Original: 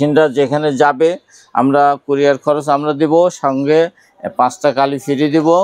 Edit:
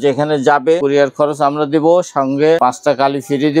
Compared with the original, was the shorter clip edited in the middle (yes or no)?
yes